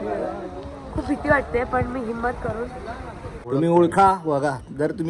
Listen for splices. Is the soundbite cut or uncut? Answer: cut